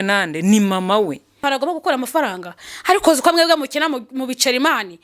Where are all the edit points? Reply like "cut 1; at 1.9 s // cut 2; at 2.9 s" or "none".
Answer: cut 1; at 1.4 s